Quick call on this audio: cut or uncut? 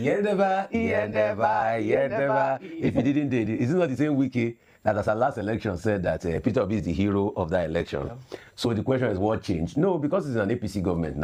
uncut